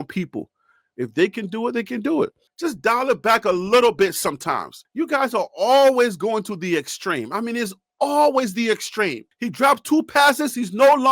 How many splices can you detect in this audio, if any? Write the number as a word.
one